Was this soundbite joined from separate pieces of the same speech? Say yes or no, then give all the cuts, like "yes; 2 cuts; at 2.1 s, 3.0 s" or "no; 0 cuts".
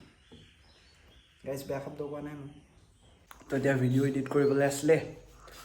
yes; 1 cut; at 3.3 s